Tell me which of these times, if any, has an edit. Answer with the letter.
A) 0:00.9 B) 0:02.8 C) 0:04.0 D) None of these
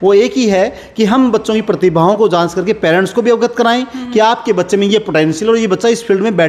D